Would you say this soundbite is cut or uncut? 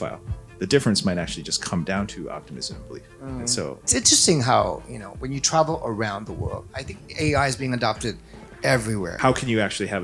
cut